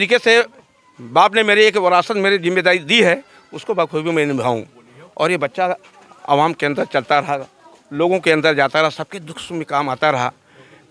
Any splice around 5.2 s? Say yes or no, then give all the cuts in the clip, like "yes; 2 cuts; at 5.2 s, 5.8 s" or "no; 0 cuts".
no; 0 cuts